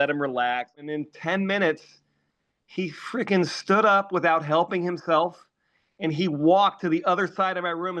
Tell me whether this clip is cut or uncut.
cut